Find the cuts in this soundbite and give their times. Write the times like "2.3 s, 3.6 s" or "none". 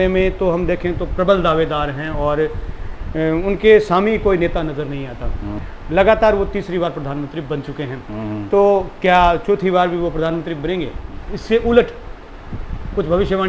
5.7 s, 11.1 s